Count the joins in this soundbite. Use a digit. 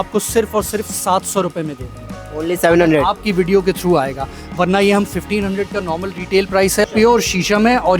1